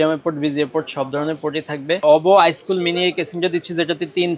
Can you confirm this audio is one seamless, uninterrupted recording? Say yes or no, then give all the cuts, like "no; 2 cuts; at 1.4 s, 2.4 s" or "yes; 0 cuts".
no; 1 cut; at 2.0 s